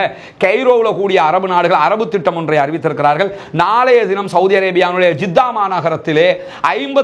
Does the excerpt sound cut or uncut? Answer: uncut